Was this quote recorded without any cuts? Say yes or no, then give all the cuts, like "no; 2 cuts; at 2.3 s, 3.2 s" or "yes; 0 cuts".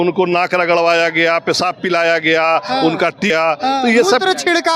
no; 1 cut; at 3.3 s